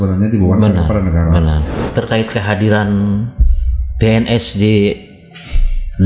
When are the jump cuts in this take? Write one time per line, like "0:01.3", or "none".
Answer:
0:01.8